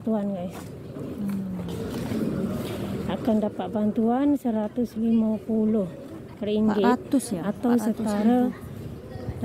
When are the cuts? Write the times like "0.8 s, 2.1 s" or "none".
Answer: none